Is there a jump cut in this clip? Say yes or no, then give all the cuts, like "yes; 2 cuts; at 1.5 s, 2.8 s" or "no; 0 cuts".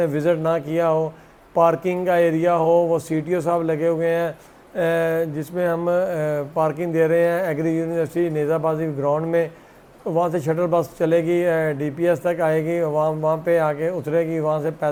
no; 0 cuts